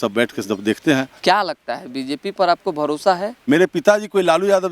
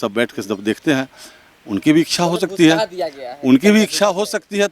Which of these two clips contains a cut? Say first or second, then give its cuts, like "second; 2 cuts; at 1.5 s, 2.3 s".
first; 2 cuts; at 1.1 s, 3.3 s